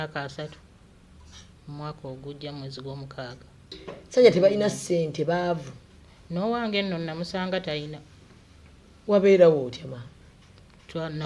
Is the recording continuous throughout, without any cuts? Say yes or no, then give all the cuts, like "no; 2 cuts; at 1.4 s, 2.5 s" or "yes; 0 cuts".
no; 1 cut; at 3.7 s